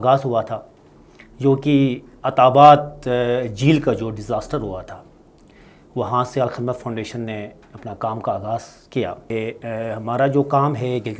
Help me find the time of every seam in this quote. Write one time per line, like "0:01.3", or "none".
0:09.3